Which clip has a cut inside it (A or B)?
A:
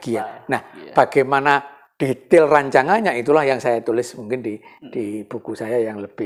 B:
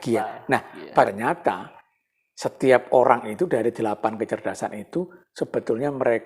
B